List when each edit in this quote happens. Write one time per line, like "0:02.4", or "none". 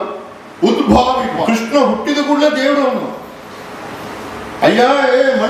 0:01.4